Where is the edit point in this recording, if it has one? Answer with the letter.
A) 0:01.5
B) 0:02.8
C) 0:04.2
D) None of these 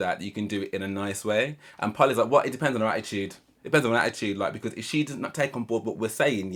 D